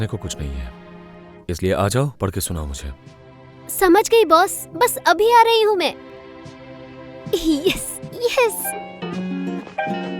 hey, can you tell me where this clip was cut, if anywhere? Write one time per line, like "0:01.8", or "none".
0:08.7